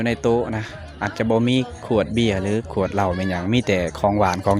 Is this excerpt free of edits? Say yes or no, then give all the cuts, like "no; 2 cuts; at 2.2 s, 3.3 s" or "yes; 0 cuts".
yes; 0 cuts